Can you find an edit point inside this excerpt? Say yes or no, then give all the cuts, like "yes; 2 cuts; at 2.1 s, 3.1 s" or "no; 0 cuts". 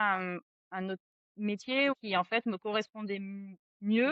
yes; 1 cut; at 1.9 s